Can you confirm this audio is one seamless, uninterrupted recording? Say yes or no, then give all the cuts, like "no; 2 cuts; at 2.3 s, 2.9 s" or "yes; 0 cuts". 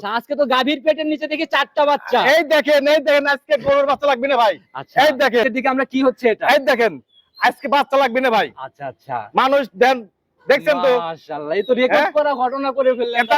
no; 1 cut; at 5.5 s